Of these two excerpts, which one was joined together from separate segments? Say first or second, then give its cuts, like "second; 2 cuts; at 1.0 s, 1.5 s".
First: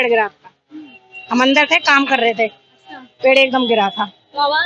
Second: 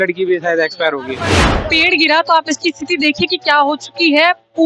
second; 1 cut; at 1.6 s